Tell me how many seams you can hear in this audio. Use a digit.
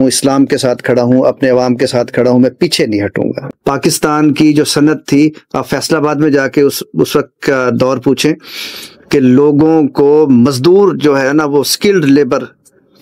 1